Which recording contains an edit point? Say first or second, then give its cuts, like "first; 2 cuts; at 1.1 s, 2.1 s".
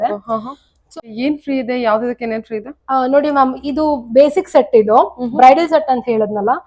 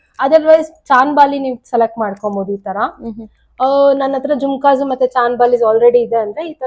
first; 1 cut; at 1.0 s